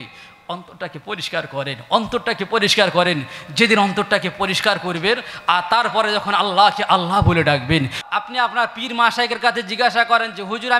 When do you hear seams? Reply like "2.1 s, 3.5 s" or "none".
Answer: 8.0 s